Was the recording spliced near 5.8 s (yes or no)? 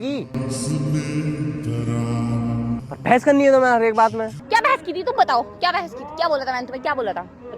no